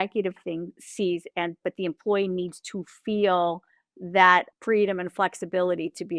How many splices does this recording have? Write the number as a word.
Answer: one